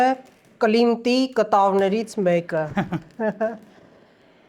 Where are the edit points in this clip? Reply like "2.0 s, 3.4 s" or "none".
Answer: none